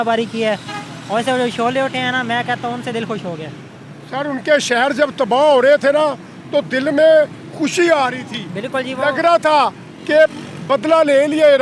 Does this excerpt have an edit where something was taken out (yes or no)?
no